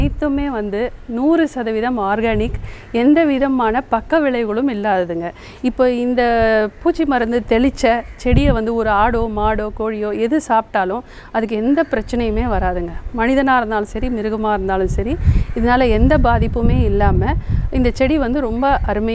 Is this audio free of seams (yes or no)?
yes